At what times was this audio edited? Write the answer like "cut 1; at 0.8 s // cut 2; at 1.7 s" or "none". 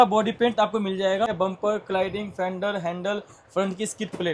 cut 1; at 1.3 s